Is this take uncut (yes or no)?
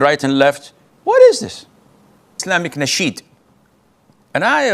no